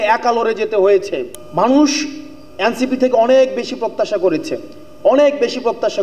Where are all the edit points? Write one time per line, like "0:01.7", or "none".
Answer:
0:01.3